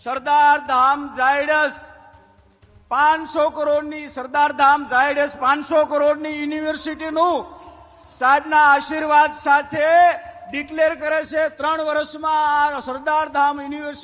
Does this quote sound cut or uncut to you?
uncut